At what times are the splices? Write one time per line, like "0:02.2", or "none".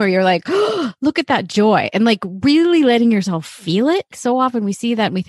0:04.1